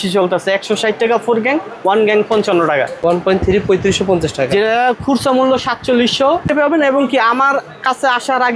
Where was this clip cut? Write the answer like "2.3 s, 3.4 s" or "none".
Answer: 3.0 s, 6.5 s

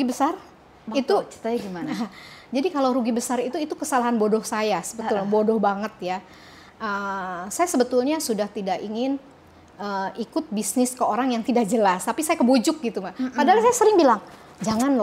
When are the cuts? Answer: none

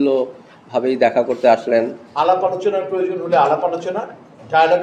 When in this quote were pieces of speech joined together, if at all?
2.0 s

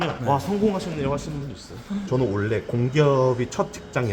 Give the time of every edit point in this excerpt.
2.0 s

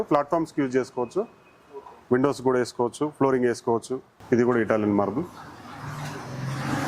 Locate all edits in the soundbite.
4.1 s

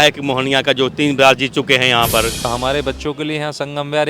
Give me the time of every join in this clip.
2.4 s

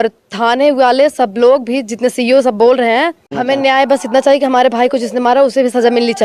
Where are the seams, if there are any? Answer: 3.3 s

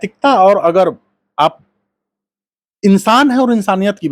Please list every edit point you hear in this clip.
none

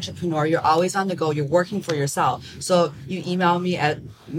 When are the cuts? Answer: none

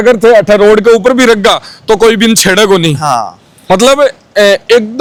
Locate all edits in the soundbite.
none

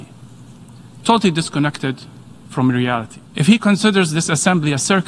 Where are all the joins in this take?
3.2 s

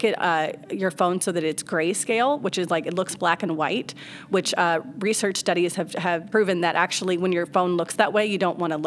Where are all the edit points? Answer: 6.2 s

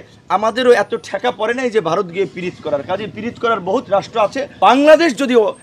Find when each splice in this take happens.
4.5 s

